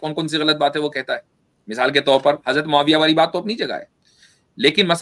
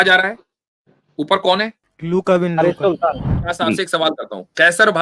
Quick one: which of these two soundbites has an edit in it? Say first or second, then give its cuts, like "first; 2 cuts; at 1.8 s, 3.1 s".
second; 2 cuts; at 1.9 s, 3.4 s